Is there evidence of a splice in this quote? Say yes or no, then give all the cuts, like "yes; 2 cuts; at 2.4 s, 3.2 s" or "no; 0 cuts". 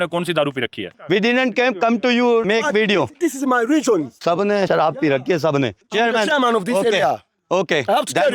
yes; 3 cuts; at 1.0 s, 4.1 s, 5.8 s